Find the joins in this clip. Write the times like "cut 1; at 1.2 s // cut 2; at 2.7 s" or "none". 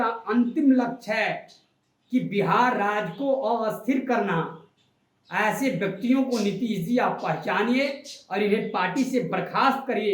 none